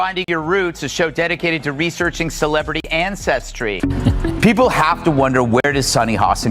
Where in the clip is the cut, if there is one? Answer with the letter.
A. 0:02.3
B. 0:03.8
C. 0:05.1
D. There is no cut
B